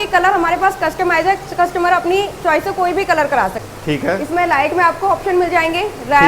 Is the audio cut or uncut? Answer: cut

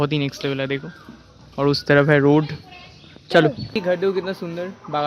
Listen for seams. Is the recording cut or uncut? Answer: cut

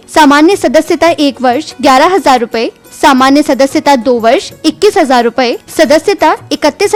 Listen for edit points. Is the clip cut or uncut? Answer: uncut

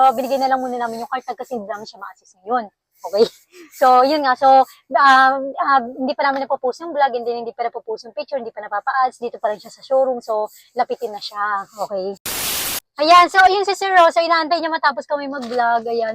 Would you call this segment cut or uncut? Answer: cut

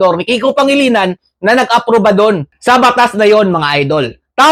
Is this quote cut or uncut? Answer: uncut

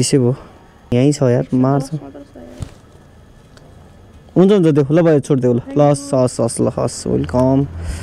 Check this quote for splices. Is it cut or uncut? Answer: cut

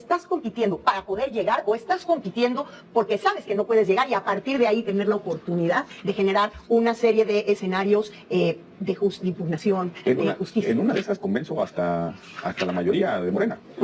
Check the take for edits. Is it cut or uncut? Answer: uncut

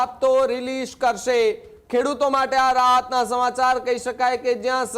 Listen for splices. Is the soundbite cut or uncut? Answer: uncut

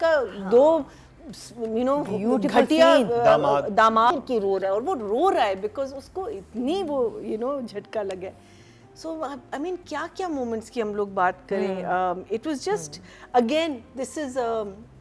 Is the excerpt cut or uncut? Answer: cut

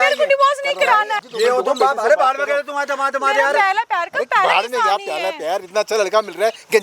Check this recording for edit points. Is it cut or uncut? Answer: cut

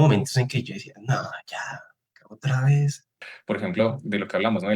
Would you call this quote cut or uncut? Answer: cut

